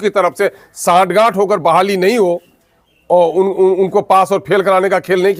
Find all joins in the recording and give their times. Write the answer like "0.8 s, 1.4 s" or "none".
none